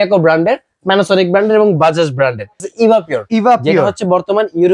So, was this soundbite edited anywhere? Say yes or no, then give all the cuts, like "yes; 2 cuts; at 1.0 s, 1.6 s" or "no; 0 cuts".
yes; 1 cut; at 2.6 s